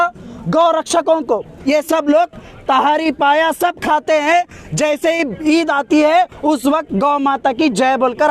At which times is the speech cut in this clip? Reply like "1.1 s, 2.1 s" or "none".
1.5 s